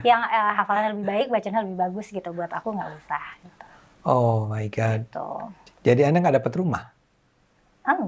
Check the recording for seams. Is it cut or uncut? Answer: uncut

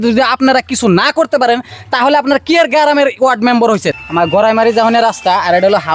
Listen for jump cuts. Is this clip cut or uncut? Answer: cut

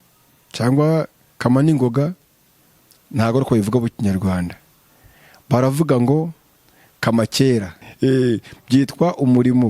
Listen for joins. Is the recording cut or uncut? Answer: cut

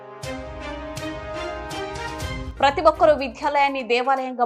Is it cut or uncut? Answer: uncut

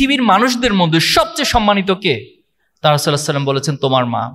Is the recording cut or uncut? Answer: uncut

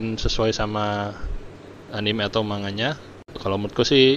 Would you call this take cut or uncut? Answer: cut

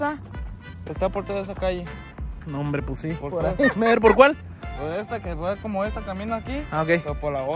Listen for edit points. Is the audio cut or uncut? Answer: uncut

